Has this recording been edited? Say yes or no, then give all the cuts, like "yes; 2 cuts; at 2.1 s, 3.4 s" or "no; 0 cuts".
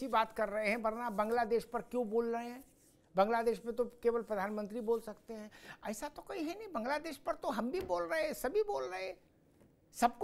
no; 0 cuts